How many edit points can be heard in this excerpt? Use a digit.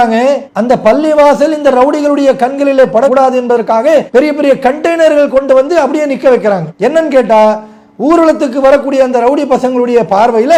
0